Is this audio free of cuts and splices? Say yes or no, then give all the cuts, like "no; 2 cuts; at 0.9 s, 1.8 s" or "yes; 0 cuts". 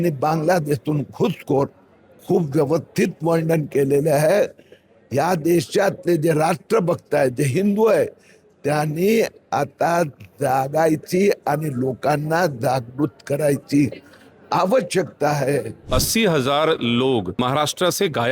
no; 2 cuts; at 15.8 s, 17.4 s